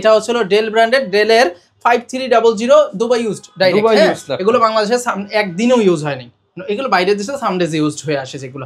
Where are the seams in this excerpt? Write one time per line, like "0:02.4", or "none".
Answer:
none

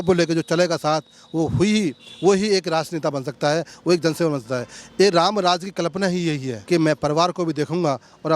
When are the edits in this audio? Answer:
0:06.5

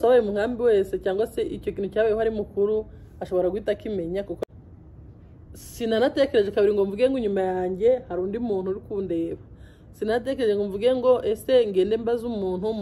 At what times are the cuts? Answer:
0:04.4

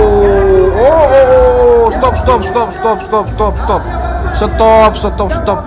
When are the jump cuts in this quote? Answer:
none

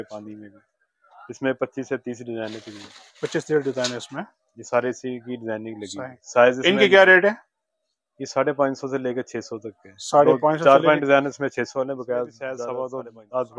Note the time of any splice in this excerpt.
0:12.6

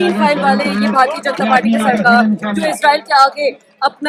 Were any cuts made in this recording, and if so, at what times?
none

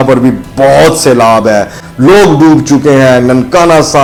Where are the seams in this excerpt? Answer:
none

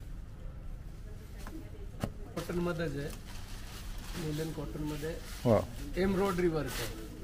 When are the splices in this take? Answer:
0:02.4

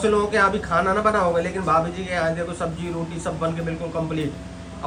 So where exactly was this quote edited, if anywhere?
none

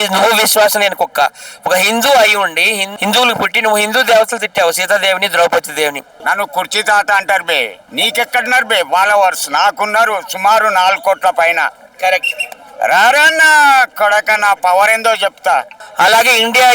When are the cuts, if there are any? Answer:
0:02.8
0:06.1
0:15.8

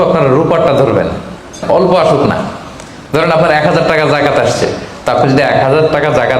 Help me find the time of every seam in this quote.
0:01.6

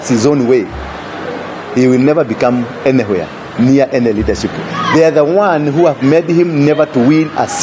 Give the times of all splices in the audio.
none

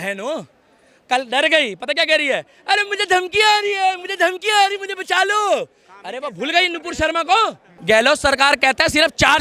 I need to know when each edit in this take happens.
0:07.7

